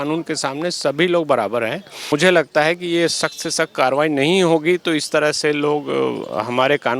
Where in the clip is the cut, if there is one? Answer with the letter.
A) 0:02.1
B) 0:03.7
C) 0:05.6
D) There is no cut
A